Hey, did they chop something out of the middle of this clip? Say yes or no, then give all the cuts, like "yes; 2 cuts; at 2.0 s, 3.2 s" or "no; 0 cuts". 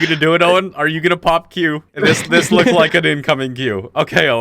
yes; 1 cut; at 1.9 s